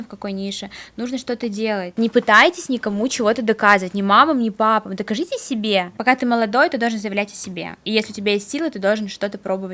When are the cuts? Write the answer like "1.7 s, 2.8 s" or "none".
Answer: 1.9 s, 5.9 s